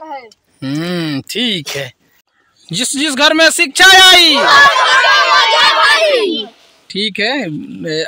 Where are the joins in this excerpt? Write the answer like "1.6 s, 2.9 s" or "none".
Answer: 2.4 s

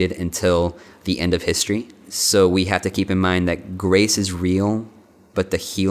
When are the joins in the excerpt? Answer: 2.1 s

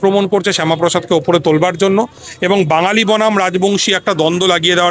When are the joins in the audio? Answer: none

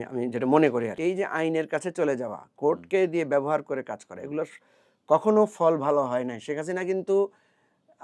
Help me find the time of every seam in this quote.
0.9 s

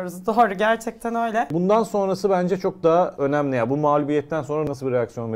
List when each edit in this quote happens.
1.5 s, 3.1 s, 4.7 s

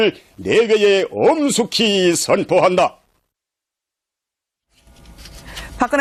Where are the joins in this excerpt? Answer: none

